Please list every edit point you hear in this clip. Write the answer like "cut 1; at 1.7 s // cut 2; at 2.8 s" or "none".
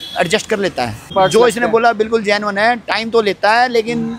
cut 1; at 1.1 s